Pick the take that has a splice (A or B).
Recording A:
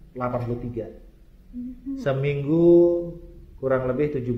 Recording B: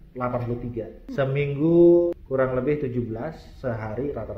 B